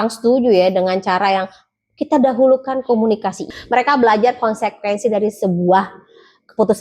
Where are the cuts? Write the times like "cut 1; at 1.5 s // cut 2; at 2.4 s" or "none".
cut 1; at 3.5 s